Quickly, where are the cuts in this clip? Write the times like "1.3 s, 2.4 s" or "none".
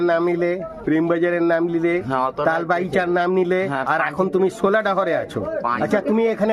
none